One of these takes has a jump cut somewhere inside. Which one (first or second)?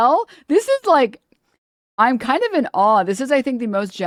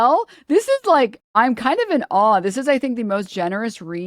second